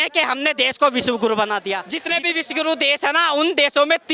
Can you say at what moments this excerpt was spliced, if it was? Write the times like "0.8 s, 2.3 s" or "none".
1.9 s